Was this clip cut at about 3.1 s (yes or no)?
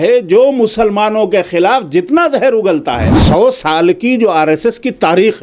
yes